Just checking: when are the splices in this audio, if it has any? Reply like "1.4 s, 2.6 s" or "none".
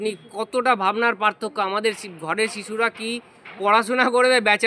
none